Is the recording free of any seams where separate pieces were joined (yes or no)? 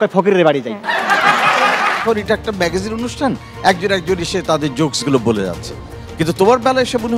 no